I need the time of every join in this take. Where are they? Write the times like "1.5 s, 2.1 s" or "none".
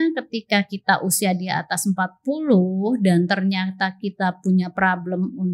none